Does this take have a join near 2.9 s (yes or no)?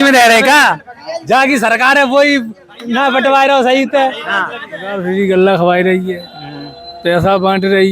no